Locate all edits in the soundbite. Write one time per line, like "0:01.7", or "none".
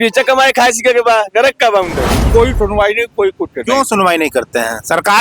0:02.2